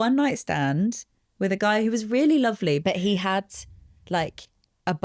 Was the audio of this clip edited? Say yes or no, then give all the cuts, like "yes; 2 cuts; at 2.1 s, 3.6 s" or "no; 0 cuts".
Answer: yes; 1 cut; at 2.8 s